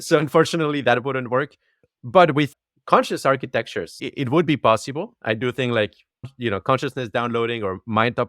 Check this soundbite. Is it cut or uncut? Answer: cut